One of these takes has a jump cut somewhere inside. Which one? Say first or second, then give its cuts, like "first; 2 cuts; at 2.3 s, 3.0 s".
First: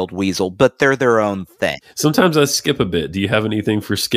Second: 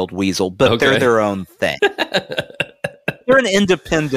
first; 1 cut; at 1.7 s